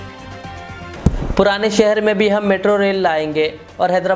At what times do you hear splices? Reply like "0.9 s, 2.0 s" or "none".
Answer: 0.9 s